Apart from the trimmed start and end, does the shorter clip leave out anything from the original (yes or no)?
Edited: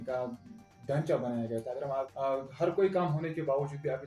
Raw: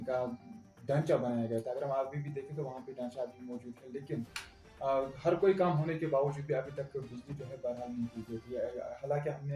yes